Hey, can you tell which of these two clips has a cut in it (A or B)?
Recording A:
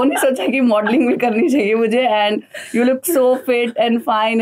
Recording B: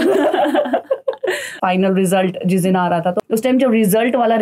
B